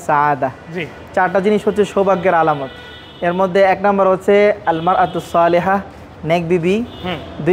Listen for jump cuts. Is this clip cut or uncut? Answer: uncut